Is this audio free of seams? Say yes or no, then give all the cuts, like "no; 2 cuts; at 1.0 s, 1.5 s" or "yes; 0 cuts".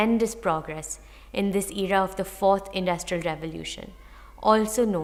yes; 0 cuts